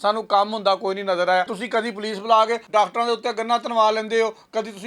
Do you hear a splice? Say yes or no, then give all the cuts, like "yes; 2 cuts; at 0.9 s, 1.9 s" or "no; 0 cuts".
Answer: yes; 2 cuts; at 1.6 s, 2.6 s